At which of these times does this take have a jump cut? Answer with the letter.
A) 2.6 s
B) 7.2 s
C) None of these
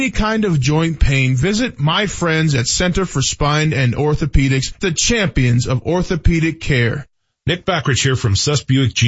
B